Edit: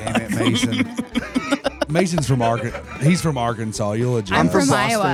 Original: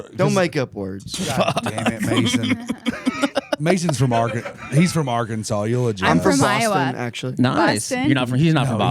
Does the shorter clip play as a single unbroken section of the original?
yes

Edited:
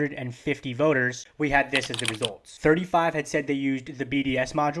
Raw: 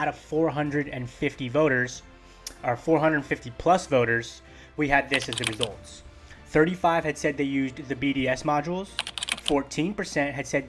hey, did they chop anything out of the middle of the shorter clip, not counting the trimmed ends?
yes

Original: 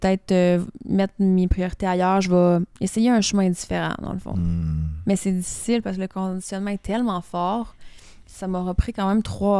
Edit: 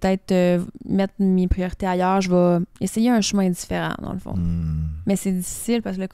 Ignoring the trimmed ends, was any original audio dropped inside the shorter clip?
no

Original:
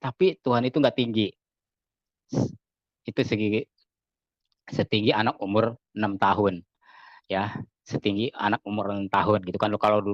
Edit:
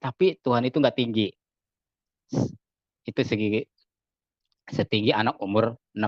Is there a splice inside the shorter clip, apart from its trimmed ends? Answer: no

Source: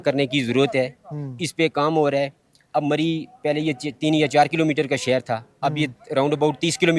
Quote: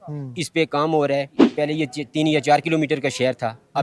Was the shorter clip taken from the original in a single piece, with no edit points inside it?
no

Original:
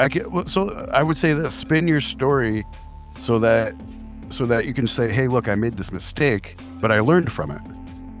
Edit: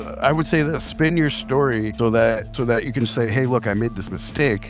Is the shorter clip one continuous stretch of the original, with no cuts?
no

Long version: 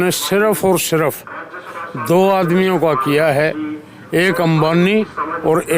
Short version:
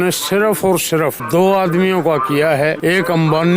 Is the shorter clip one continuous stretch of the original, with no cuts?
no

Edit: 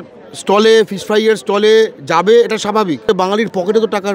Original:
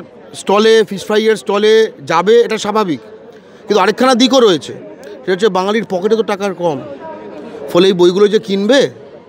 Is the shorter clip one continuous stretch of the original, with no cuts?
no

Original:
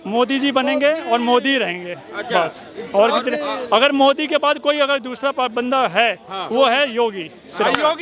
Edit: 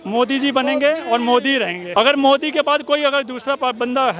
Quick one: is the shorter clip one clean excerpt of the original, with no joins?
no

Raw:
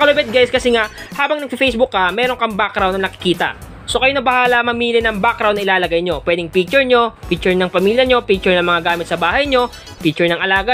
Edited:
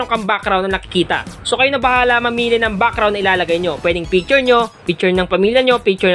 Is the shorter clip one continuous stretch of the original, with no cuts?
no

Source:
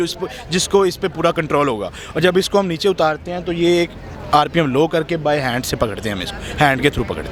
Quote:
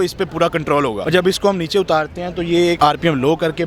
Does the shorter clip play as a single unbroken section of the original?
no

